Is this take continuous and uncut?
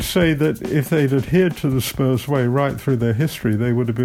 yes; 0 cuts

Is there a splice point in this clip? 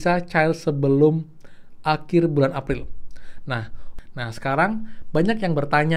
yes; 1 cut; at 3.8 s

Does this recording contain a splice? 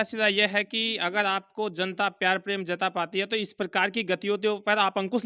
no; 0 cuts

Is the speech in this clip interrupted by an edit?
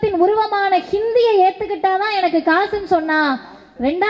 no; 0 cuts

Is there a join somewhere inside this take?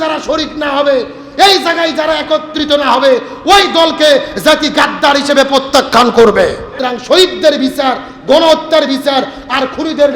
yes; 1 cut; at 6.8 s

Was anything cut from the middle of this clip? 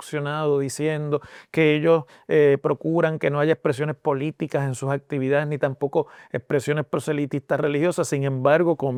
no; 0 cuts

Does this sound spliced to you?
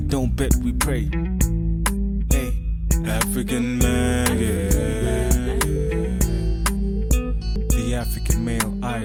no; 0 cuts

